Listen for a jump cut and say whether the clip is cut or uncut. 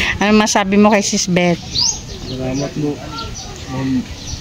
uncut